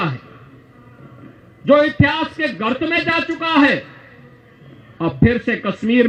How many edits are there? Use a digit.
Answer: 0